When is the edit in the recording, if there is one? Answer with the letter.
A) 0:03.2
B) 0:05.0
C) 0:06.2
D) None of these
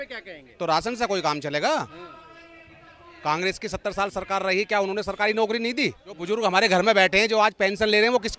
C